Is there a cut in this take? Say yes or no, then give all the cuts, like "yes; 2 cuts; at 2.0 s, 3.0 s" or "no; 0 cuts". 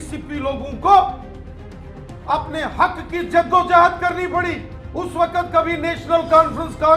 no; 0 cuts